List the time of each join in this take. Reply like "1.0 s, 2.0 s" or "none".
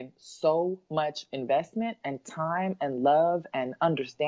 none